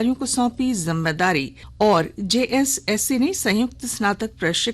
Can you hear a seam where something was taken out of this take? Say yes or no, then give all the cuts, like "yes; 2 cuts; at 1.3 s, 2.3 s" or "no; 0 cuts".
yes; 1 cut; at 1.6 s